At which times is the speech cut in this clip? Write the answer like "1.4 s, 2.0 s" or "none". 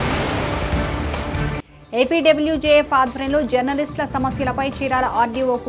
1.3 s